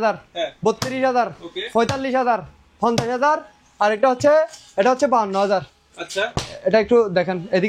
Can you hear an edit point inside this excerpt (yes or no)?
no